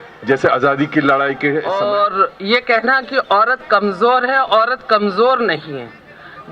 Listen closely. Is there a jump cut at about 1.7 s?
yes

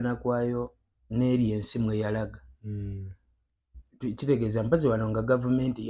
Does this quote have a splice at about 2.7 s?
no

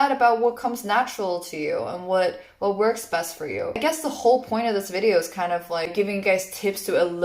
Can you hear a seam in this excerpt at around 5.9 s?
yes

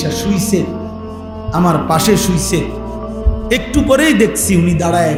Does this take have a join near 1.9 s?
no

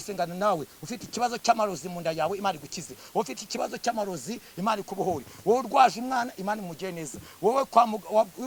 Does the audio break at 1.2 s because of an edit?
no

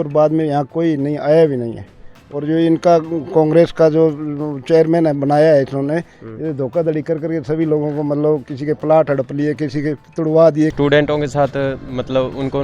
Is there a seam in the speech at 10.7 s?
yes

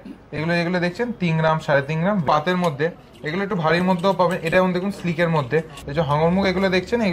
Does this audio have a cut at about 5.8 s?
yes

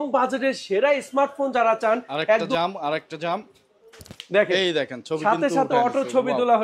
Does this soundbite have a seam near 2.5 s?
yes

